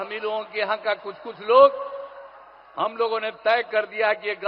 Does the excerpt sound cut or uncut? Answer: uncut